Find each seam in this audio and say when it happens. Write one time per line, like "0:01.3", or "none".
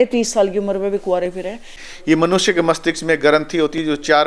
0:01.7